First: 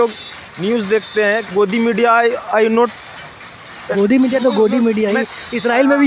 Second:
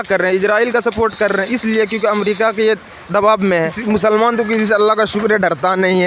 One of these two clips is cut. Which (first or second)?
second